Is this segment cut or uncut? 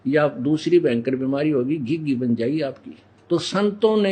cut